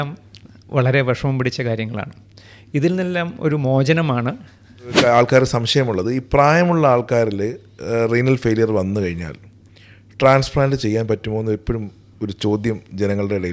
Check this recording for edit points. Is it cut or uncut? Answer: cut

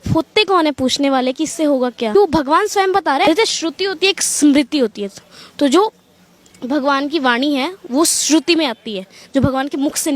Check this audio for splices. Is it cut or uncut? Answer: cut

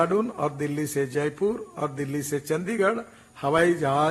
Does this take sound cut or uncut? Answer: uncut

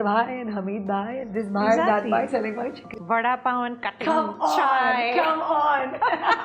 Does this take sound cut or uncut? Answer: cut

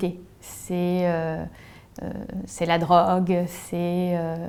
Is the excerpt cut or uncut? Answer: uncut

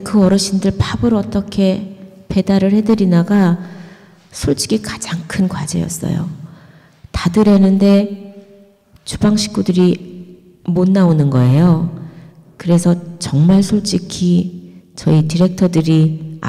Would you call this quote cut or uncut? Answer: uncut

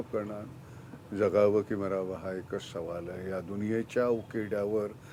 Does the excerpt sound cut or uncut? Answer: uncut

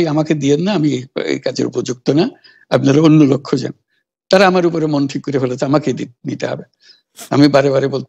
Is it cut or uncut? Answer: uncut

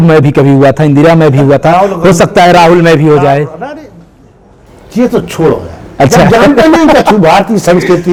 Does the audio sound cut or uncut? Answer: uncut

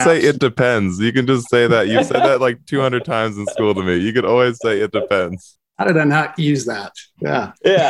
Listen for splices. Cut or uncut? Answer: uncut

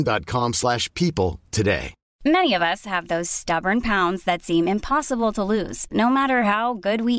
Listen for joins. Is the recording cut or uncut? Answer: cut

